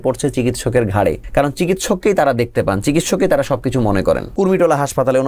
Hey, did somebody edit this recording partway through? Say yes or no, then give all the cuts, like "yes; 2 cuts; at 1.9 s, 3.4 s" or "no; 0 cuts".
yes; 2 cuts; at 1.2 s, 4.3 s